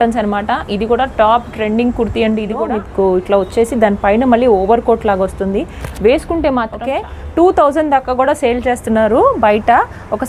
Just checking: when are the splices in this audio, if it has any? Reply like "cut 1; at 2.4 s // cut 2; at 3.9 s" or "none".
cut 1; at 2.6 s // cut 2; at 6.8 s